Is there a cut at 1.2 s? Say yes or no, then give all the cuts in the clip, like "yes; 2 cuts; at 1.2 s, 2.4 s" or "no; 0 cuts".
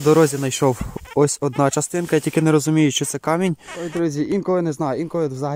no; 1 cut; at 3.7 s